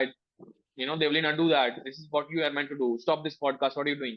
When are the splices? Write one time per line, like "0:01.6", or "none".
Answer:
none